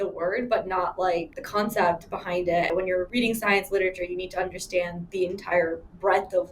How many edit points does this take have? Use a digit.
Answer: 3